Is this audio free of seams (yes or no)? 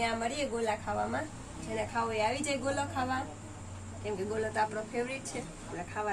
yes